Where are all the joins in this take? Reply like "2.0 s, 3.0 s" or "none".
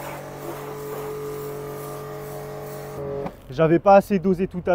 3.0 s